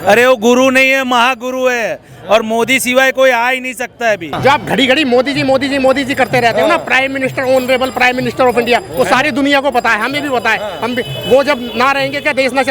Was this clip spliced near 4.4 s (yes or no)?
yes